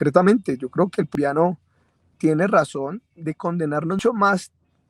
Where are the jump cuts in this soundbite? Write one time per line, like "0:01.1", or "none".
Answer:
0:01.1
0:04.0

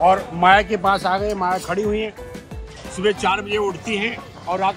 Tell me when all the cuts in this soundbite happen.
none

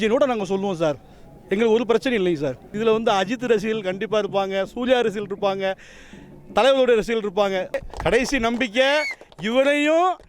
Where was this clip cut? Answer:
0:02.7
0:07.8

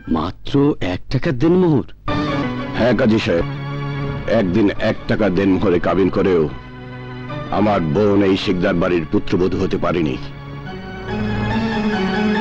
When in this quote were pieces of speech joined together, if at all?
none

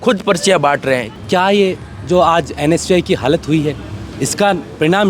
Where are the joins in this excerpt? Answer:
0:01.1

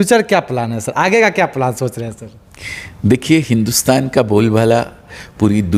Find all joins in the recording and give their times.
none

